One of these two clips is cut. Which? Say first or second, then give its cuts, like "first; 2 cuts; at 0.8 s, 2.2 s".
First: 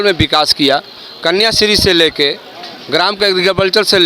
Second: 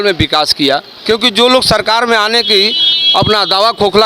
second; 1 cut; at 0.9 s